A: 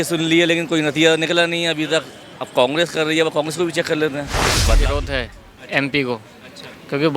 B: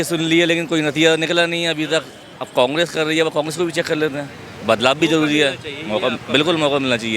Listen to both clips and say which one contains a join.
A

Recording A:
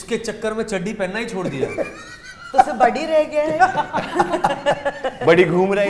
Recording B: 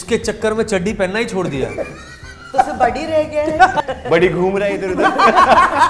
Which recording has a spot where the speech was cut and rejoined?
B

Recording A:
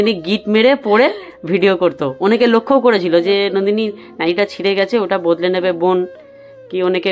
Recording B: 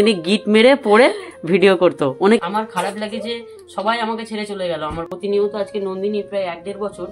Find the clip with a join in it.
B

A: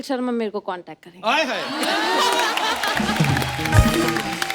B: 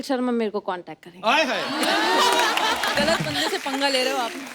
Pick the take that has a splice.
B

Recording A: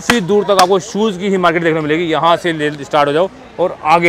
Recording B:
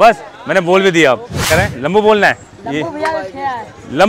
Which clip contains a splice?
B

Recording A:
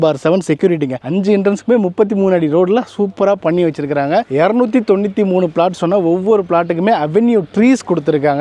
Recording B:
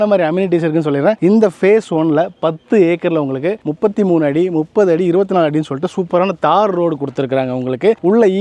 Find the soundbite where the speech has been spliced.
A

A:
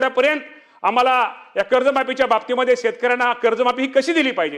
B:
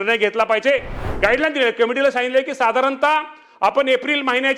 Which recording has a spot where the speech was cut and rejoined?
B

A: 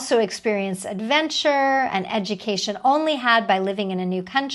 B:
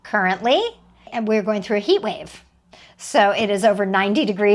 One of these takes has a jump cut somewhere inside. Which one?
B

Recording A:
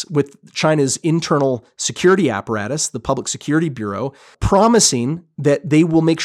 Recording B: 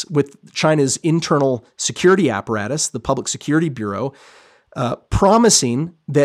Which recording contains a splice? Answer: A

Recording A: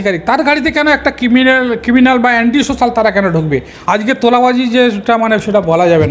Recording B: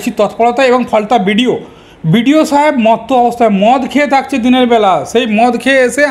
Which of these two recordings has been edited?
A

